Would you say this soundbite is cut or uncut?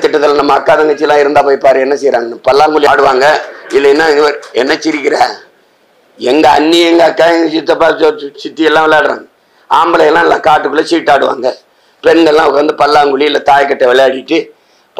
uncut